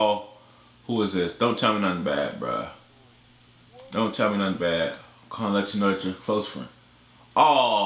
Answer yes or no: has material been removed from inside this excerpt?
no